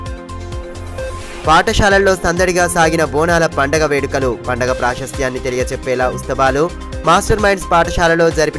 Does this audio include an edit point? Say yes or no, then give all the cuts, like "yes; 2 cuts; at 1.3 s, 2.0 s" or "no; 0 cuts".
yes; 1 cut; at 1.1 s